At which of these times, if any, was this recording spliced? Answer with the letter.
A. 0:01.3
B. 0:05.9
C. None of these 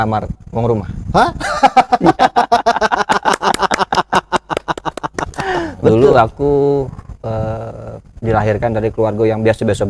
B